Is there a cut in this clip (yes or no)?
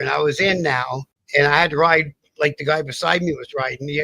yes